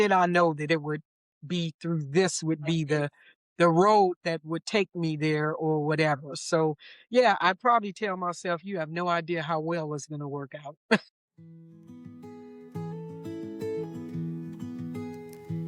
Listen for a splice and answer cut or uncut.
cut